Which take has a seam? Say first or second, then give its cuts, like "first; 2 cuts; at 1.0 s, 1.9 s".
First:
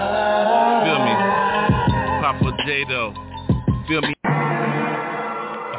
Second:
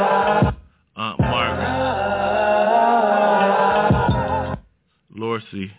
first; 1 cut; at 4.2 s